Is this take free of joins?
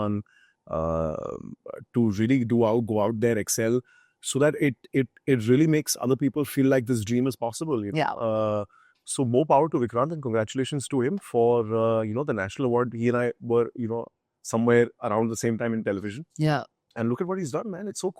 yes; 0 cuts

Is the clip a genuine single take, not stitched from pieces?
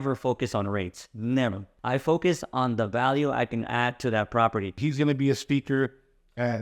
no; 2 cuts; at 1.7 s, 4.8 s

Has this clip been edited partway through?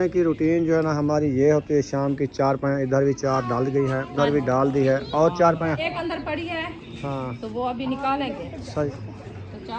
yes; 3 cuts; at 4.1 s, 5.9 s, 8.9 s

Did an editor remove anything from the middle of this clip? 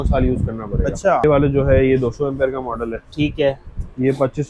yes; 1 cut; at 1.2 s

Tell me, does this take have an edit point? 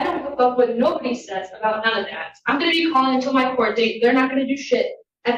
no; 0 cuts

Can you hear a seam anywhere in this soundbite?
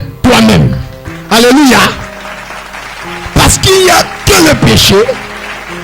no; 0 cuts

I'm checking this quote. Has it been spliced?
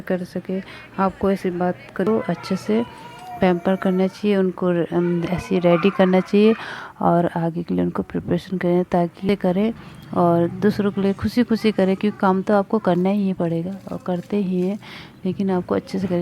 yes; 2 cuts; at 2.1 s, 9.3 s

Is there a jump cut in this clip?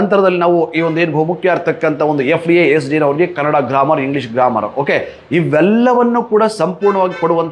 no; 0 cuts

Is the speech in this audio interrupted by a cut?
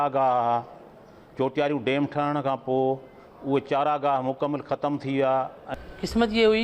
yes; 1 cut; at 5.6 s

